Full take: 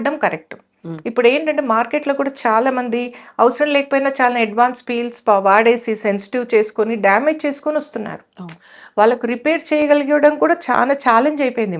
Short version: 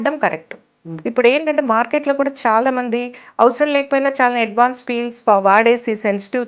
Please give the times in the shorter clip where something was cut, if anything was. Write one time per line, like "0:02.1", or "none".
none